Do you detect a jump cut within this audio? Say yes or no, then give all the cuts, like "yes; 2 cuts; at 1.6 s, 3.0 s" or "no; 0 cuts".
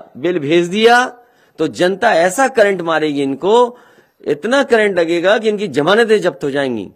no; 0 cuts